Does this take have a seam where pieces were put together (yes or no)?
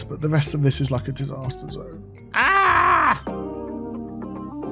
yes